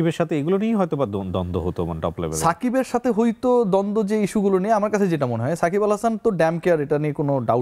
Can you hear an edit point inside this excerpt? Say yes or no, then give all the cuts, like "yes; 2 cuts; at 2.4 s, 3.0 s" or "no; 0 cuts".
no; 0 cuts